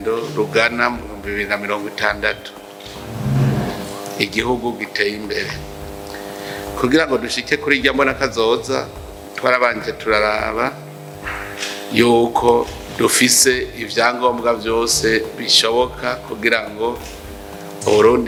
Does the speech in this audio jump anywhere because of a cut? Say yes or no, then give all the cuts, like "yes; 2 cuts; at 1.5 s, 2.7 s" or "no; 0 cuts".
no; 0 cuts